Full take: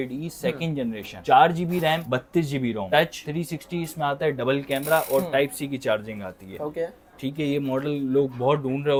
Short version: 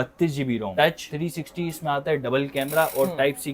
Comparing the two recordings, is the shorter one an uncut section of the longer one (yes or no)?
yes